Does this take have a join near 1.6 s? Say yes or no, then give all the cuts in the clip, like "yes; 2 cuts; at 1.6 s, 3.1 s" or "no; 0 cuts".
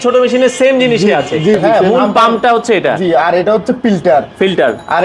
yes; 1 cut; at 1.6 s